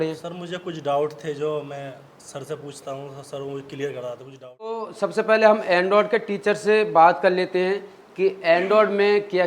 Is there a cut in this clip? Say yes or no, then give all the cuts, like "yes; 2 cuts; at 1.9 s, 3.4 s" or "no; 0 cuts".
yes; 1 cut; at 4.9 s